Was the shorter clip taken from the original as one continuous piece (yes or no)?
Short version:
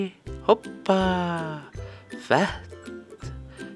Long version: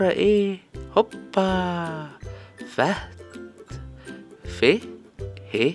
yes